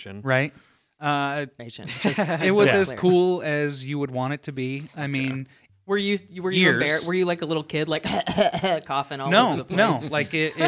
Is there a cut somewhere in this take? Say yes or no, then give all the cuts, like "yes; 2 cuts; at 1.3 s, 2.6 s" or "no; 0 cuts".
yes; 2 cuts; at 1.6 s, 5.5 s